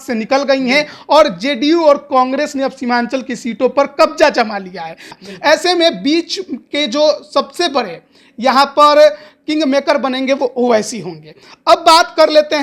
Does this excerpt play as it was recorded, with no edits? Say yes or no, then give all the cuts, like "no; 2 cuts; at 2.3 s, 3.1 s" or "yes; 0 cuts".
no; 1 cut; at 5.1 s